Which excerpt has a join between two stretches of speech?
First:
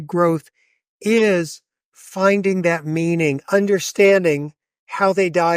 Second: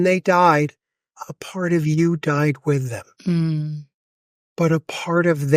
first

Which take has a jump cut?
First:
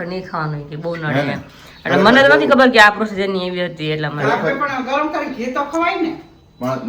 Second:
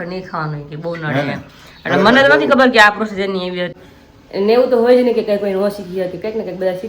second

